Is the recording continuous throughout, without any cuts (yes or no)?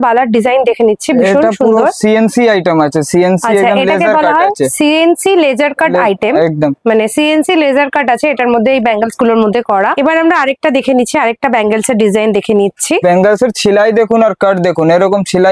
yes